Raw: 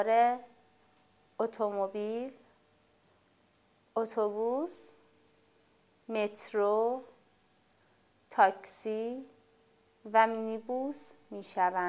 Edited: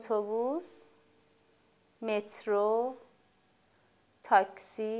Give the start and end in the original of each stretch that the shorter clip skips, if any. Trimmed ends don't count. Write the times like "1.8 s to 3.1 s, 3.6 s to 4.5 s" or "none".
none

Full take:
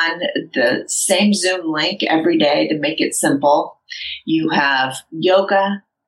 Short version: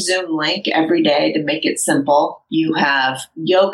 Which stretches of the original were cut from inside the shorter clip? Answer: 3.8 s to 4.2 s

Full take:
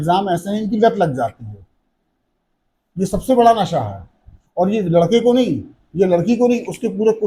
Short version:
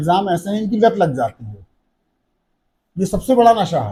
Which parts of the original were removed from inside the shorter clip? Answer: none

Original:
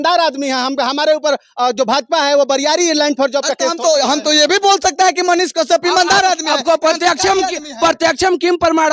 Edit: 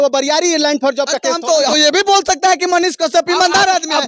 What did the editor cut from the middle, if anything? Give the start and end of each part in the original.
4.1 s to 4.2 s

